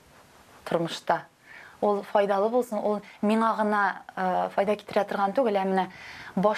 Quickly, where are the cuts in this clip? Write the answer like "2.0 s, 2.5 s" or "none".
none